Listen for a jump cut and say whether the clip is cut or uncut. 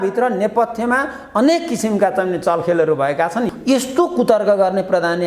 cut